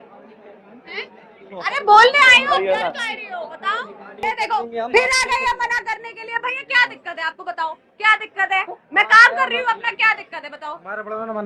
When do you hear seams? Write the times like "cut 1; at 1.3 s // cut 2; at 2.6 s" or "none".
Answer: cut 1; at 4.2 s